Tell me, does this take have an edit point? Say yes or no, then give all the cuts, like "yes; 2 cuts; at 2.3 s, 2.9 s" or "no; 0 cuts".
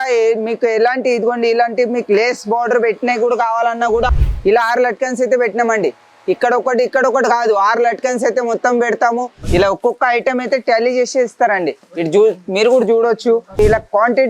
yes; 3 cuts; at 4.1 s, 9.3 s, 13.6 s